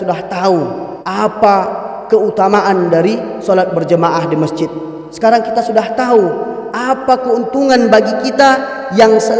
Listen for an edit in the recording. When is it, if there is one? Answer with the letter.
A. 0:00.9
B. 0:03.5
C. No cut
A